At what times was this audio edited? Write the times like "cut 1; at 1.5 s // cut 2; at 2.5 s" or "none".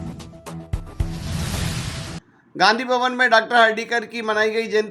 cut 1; at 2.0 s